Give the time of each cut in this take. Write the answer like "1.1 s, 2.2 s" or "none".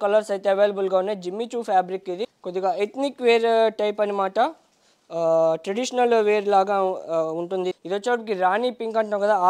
2.3 s, 7.7 s

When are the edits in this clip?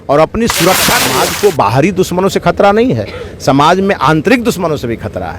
1.0 s

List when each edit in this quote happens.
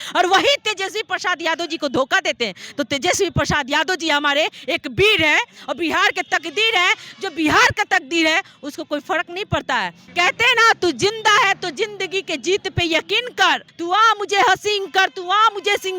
10.0 s, 13.7 s

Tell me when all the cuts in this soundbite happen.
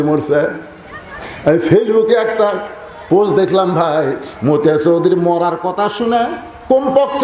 none

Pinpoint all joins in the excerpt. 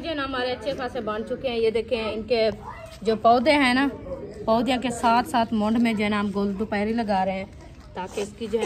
none

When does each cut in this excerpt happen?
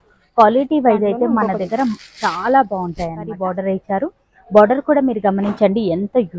3.4 s

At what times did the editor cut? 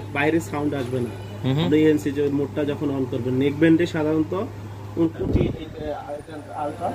5.2 s

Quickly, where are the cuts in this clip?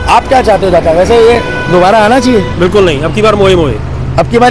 none

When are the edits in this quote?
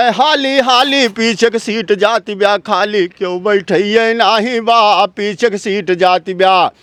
none

